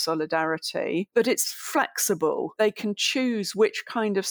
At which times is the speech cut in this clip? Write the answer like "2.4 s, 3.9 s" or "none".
1.1 s, 2.5 s